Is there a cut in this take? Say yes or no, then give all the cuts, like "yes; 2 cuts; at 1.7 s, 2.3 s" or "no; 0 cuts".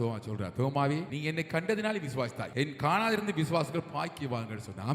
yes; 2 cuts; at 1.1 s, 2.4 s